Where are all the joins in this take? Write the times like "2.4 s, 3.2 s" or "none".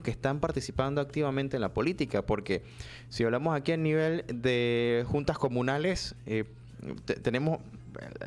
none